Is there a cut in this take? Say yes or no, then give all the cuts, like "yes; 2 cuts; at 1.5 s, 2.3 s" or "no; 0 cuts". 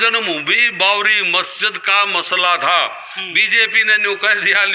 no; 0 cuts